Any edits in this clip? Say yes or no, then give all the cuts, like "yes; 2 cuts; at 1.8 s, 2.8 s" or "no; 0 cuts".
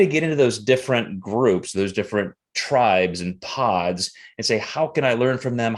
no; 0 cuts